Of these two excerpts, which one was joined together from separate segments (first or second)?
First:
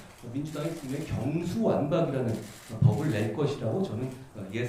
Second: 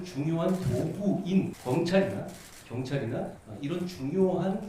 second